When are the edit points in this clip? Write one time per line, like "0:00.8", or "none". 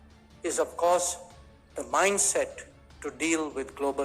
none